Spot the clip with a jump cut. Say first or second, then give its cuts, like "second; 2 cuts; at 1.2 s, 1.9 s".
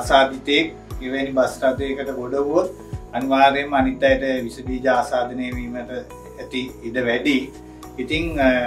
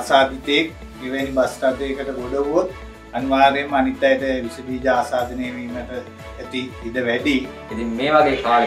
second; 1 cut; at 7.7 s